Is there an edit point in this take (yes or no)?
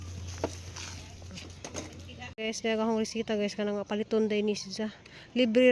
yes